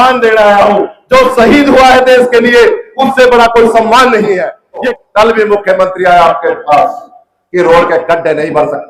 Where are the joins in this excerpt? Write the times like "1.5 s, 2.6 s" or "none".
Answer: 4.9 s